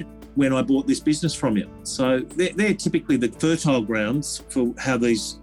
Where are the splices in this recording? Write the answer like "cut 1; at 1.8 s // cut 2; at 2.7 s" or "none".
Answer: cut 1; at 1.8 s // cut 2; at 3.3 s